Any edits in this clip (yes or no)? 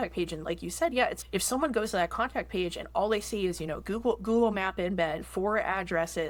no